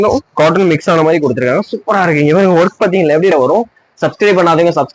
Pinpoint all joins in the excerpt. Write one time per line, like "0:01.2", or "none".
0:03.3